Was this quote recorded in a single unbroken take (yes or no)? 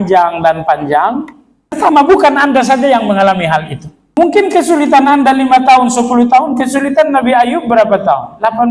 no